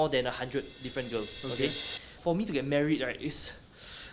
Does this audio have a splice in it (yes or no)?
yes